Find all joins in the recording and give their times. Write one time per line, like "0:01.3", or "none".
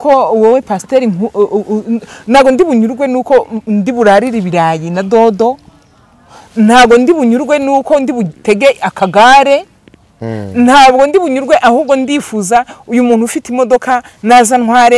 none